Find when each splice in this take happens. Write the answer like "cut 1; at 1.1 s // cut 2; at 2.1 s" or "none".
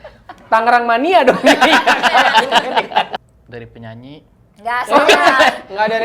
cut 1; at 3.1 s